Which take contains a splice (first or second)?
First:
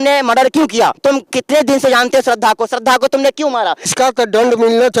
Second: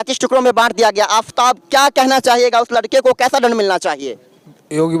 first